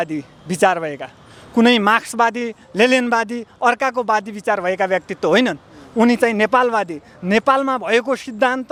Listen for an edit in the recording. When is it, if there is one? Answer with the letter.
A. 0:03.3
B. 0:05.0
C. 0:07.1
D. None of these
D